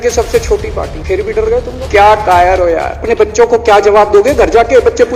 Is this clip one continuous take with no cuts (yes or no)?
no